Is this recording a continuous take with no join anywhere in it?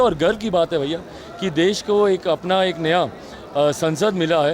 yes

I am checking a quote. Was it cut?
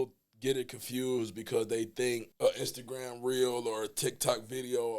yes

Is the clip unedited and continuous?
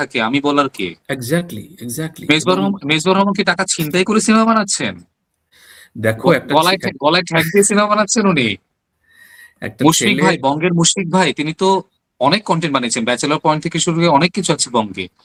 yes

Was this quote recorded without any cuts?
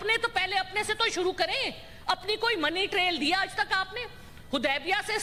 yes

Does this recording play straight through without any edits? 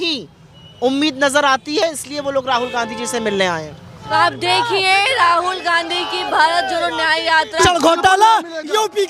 yes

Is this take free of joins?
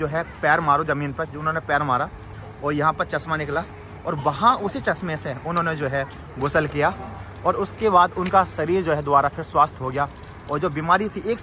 yes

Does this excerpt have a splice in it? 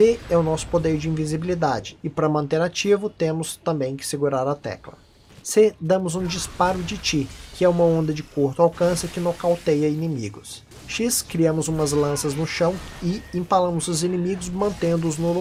no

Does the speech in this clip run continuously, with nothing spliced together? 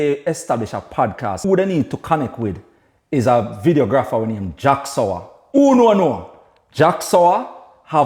no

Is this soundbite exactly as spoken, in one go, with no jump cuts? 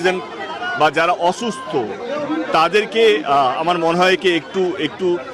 yes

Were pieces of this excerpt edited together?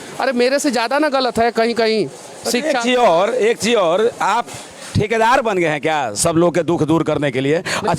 no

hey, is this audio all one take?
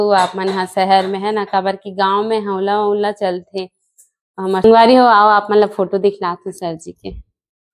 no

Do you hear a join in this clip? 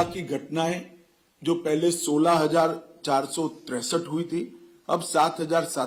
no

